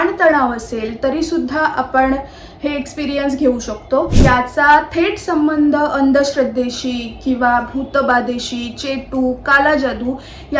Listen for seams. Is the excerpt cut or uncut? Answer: cut